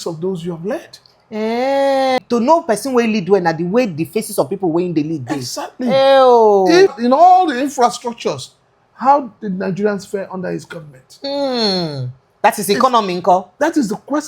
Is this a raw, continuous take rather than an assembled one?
no; 2 cuts; at 2.2 s, 7.0 s

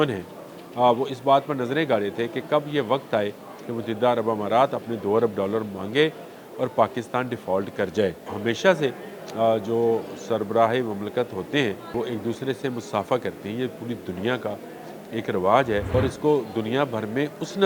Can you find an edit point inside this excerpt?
yes; 3 cuts; at 8.3 s, 11.9 s, 15.9 s

